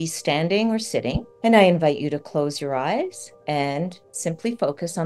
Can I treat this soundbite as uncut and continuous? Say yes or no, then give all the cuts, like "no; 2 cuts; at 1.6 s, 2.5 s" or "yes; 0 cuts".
no; 3 cuts; at 1.3 s, 3.3 s, 4.1 s